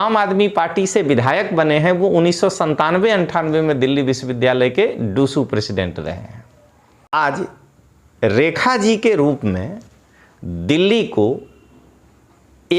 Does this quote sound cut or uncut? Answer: cut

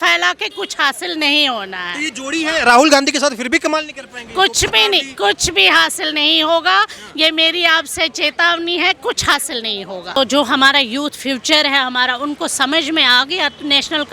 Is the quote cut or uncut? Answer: cut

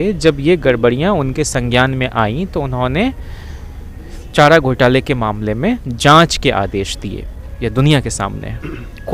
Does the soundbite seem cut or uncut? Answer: uncut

